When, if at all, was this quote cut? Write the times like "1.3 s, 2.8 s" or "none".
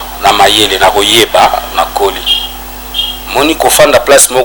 none

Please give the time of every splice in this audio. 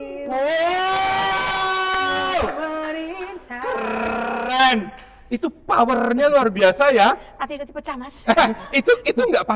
none

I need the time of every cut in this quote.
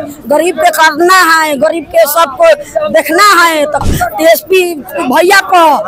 3.8 s

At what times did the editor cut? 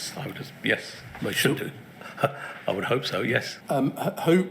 3.5 s

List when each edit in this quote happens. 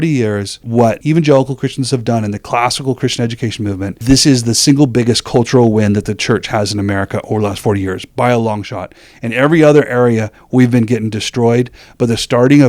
0.9 s, 3.9 s

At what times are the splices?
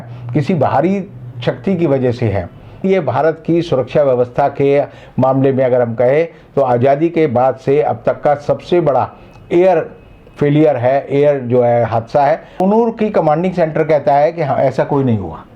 2.8 s, 12.5 s

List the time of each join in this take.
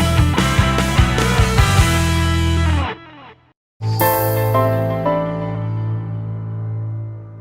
3.7 s

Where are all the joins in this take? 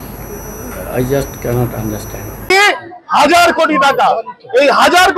2.5 s

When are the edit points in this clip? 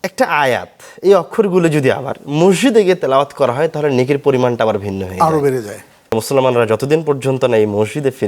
6.1 s

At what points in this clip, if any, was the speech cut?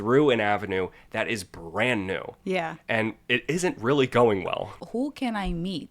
4.7 s

